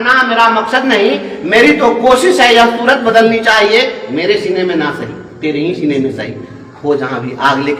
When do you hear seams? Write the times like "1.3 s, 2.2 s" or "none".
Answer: none